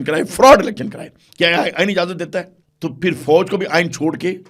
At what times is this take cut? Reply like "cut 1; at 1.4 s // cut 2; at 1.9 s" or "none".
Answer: cut 1; at 2.6 s